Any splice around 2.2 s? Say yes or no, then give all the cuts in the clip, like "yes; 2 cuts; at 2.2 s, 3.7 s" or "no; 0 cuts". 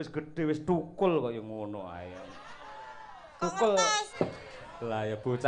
no; 1 cut; at 4.1 s